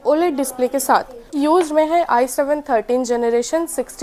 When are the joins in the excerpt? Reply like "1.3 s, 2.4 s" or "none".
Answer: 1.4 s